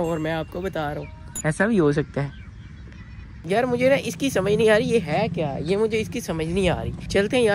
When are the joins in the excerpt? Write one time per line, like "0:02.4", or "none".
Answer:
none